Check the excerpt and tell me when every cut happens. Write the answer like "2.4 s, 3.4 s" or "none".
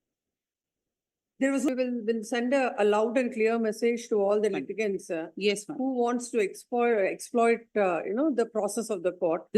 1.7 s